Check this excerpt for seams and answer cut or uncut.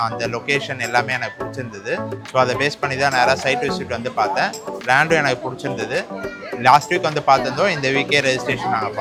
uncut